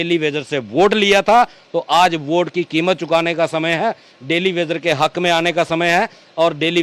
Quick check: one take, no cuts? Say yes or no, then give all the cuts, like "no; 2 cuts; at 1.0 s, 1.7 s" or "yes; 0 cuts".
yes; 0 cuts